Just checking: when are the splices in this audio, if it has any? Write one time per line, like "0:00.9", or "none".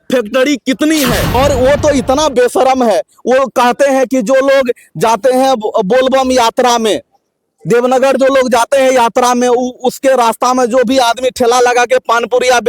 0:01.3